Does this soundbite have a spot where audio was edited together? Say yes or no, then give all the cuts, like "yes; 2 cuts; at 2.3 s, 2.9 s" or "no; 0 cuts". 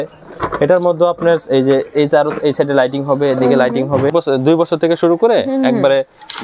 yes; 1 cut; at 4.1 s